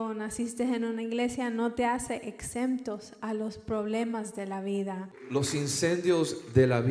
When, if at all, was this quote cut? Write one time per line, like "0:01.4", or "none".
0:05.3

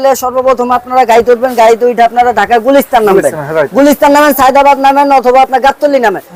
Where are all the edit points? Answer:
none

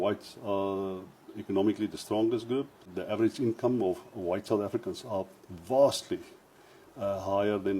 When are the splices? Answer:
0:02.9

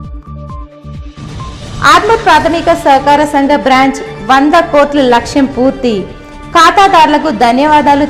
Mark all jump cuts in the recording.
0:01.7

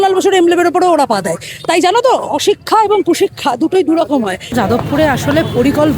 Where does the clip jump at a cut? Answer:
0:04.5

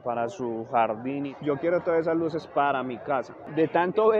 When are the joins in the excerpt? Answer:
0:01.3

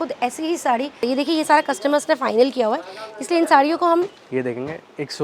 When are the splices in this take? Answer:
0:01.0
0:04.2

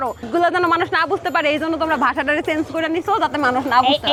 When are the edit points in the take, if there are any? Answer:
none

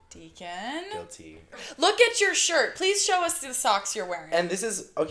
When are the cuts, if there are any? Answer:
0:01.7

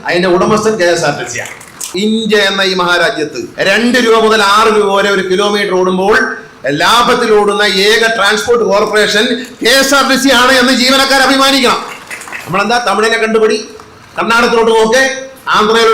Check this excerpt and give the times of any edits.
0:01.9
0:03.4

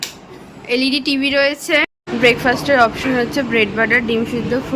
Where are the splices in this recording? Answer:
0:01.8

